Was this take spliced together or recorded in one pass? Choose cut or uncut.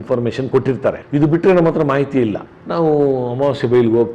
uncut